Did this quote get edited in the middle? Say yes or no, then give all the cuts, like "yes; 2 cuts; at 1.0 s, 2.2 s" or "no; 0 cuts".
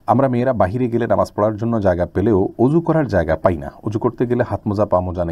no; 0 cuts